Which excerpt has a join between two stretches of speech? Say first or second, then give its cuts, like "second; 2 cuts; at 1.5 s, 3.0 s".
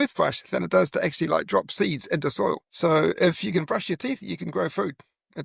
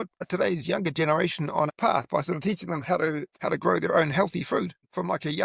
second; 1 cut; at 1.7 s